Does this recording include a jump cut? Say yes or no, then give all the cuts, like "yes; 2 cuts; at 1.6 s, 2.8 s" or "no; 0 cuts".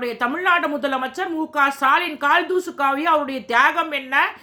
no; 0 cuts